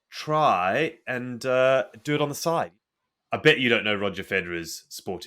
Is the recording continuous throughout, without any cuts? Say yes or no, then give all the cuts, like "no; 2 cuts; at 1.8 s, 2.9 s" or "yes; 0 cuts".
no; 1 cut; at 2.7 s